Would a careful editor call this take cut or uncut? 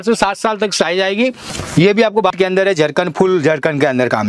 cut